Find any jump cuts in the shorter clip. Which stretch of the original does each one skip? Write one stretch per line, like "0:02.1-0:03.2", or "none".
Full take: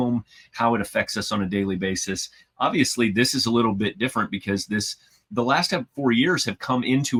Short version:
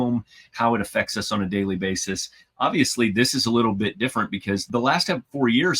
0:04.6-0:05.3